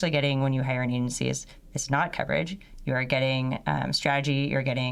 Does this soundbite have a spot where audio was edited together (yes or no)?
no